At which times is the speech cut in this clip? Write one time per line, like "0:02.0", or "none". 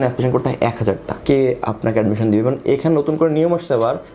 0:01.2